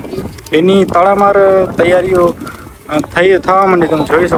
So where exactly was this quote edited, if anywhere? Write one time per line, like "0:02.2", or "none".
none